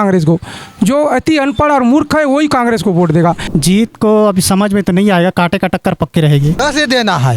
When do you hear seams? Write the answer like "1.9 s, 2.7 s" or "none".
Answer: 3.4 s, 6.6 s